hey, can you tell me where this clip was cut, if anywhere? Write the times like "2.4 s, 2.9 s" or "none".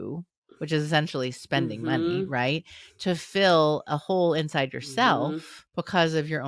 5.6 s